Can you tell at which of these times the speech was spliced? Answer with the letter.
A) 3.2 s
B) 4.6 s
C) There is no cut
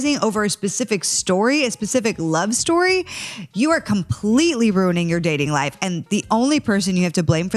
C